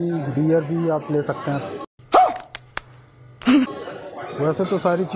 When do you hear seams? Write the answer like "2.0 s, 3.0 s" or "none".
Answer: none